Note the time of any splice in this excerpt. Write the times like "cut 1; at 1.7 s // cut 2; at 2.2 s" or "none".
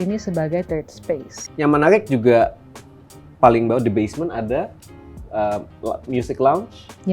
cut 1; at 1.4 s